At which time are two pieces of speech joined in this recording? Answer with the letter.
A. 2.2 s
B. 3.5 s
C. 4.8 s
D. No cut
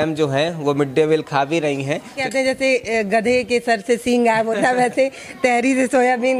A